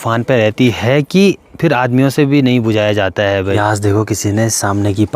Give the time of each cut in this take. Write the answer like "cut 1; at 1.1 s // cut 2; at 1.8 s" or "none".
cut 1; at 3.6 s